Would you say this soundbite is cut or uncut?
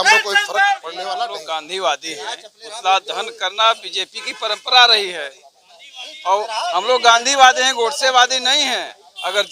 cut